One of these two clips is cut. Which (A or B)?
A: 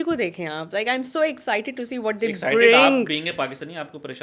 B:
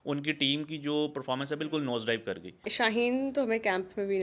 B